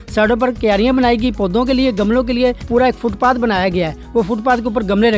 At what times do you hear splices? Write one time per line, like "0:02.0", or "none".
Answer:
none